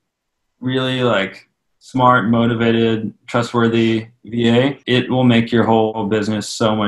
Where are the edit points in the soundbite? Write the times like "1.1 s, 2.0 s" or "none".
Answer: 4.8 s, 6.0 s